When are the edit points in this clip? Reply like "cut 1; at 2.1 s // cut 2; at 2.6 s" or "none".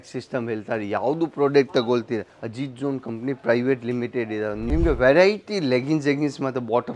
cut 1; at 2.4 s // cut 2; at 4.6 s